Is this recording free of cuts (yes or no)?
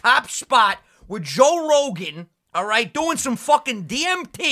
yes